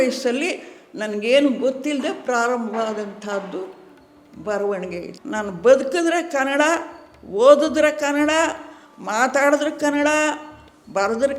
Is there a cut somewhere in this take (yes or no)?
yes